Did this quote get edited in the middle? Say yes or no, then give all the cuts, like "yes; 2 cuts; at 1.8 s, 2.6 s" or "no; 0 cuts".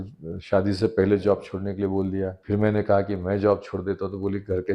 yes; 1 cut; at 2.4 s